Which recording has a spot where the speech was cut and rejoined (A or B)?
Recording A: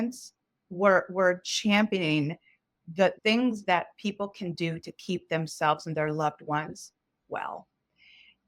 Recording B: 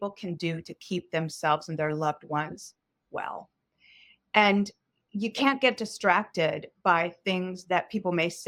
A